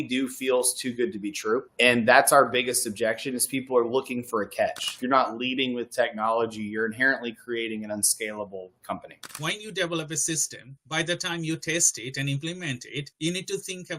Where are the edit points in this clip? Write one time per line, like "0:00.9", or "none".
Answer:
0:04.9
0:09.3